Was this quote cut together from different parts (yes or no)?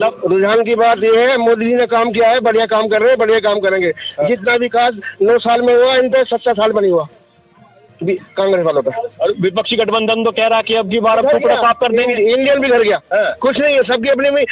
no